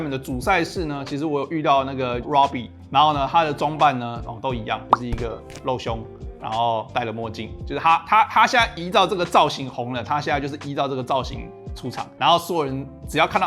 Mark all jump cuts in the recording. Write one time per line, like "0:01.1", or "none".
none